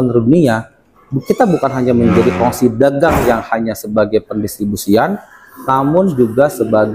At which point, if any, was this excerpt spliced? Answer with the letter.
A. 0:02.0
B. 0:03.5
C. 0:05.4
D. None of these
D